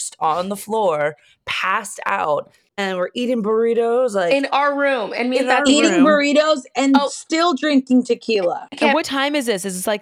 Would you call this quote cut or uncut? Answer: cut